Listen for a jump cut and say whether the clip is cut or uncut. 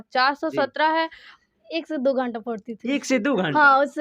cut